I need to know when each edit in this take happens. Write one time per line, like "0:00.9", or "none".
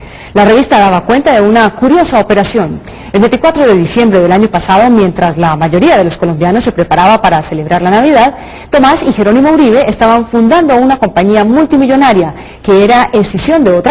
0:04.6